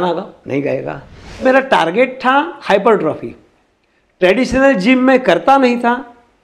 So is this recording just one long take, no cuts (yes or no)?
no